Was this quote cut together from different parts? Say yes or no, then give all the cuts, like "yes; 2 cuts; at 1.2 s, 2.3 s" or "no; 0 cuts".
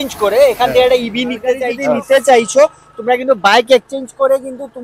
yes; 1 cut; at 1.7 s